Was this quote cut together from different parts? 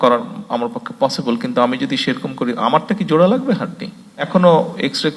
yes; 1 cut; at 4.3 s

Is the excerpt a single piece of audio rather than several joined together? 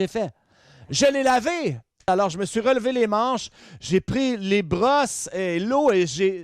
no; 1 cut; at 2.1 s

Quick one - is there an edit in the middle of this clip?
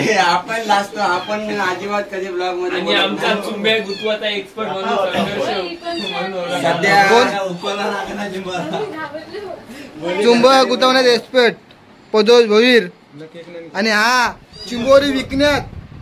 no; 0 cuts

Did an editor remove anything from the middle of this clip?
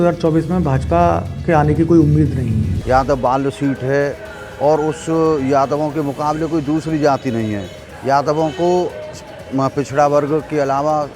yes; 1 cut; at 2.7 s

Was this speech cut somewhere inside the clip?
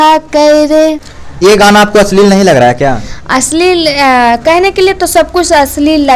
no; 0 cuts

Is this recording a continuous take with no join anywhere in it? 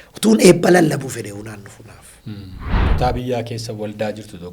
no; 1 cut; at 2.7 s

